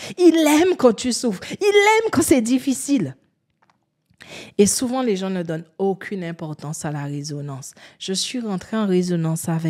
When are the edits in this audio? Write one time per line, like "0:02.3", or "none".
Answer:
none

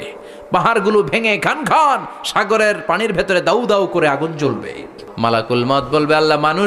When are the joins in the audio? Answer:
0:05.0

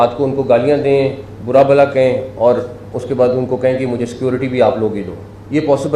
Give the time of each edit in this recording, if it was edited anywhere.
none

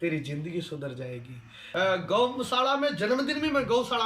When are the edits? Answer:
0:01.6

